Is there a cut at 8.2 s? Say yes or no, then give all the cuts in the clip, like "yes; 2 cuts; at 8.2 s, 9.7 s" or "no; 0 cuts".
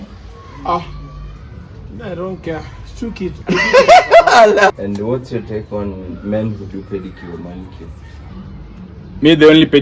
yes; 2 cuts; at 4.7 s, 8.2 s